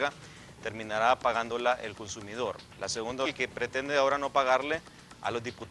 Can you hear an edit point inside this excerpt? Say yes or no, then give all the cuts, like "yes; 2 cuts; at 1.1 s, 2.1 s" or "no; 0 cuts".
no; 0 cuts